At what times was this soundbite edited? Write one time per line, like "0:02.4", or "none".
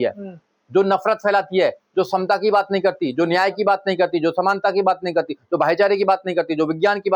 none